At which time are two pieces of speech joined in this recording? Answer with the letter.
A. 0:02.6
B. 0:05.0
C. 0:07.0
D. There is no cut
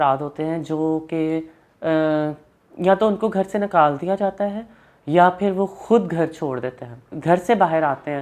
C